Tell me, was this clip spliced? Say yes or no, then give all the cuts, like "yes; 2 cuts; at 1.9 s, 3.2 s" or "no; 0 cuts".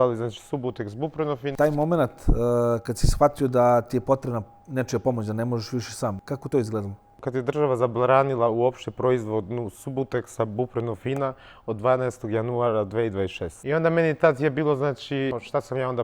yes; 3 cuts; at 1.5 s, 7.2 s, 15.3 s